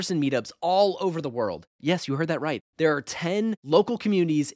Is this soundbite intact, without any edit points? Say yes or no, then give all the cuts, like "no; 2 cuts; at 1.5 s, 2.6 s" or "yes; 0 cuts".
yes; 0 cuts